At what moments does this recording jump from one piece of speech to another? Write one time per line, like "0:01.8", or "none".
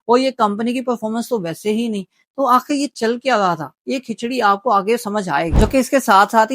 0:05.5